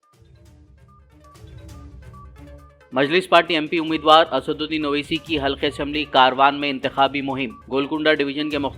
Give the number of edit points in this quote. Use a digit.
1